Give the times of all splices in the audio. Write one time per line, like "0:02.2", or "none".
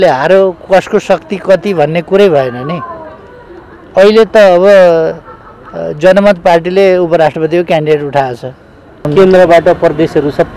0:09.0